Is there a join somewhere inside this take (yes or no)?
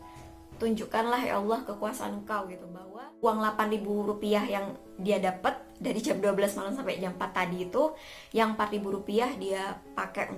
yes